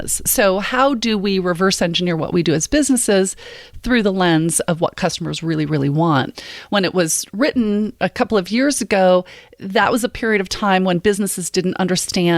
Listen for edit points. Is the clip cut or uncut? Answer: cut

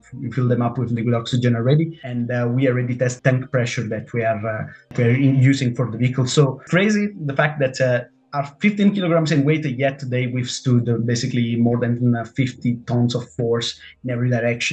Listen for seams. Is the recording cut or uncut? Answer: cut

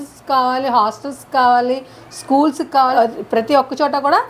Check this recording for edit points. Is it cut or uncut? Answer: cut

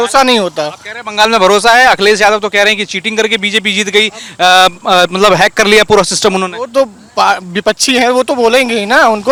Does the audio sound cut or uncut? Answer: uncut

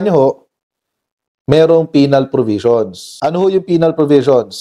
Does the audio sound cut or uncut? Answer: cut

